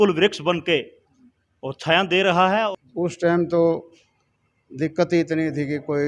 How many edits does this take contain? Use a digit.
1